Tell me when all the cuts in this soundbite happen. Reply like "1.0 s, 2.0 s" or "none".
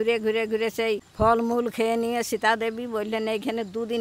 1.1 s